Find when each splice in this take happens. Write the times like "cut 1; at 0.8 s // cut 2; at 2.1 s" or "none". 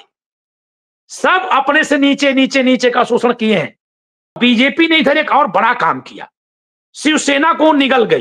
cut 1; at 4.3 s